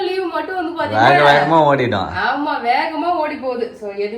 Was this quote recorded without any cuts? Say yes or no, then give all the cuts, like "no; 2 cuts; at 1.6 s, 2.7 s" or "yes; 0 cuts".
yes; 0 cuts